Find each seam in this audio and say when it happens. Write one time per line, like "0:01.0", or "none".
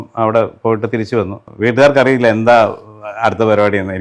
0:01.5